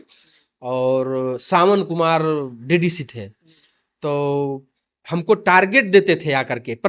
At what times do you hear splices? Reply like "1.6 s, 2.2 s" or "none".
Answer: none